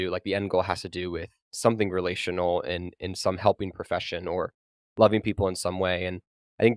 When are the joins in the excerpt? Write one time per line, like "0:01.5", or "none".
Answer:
none